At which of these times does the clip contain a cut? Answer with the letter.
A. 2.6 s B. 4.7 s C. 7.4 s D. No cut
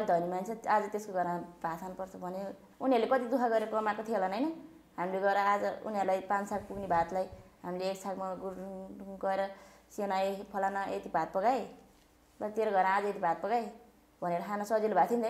A